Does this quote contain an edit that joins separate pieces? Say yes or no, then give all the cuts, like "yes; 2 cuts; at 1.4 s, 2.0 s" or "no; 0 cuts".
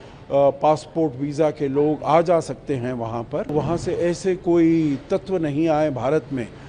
yes; 1 cut; at 3.5 s